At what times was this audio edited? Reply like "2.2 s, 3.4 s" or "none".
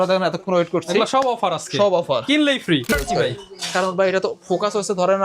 2.9 s